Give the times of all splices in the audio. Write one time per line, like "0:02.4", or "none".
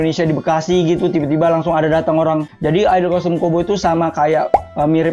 0:02.5